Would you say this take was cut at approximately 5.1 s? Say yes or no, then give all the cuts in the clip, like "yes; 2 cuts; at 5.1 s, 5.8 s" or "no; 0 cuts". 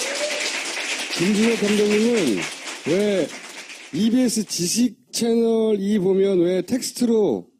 yes; 1 cut; at 5.1 s